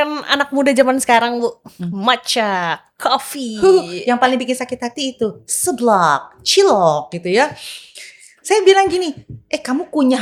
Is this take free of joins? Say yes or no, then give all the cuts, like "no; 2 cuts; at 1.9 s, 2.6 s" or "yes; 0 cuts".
yes; 0 cuts